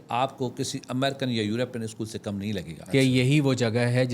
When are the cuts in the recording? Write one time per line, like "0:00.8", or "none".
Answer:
0:02.7